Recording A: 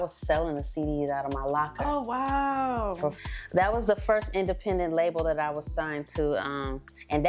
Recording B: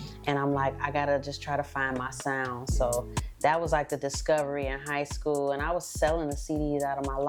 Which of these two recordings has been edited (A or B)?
A